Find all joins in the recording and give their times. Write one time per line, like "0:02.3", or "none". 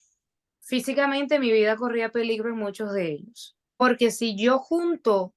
0:03.8